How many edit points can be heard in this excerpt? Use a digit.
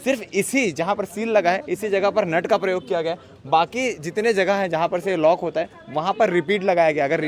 0